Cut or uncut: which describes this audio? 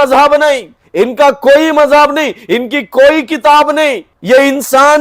cut